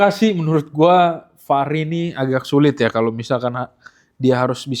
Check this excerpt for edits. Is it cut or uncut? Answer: uncut